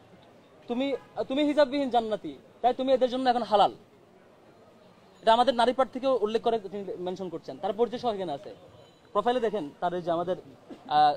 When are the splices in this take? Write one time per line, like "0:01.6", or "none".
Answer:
none